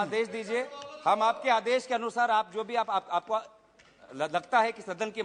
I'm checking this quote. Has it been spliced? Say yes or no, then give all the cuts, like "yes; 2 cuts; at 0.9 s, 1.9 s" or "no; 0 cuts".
no; 0 cuts